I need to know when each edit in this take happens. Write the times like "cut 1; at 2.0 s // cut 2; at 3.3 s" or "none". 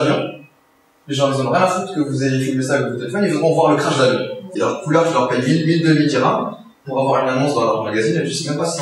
cut 1; at 4.5 s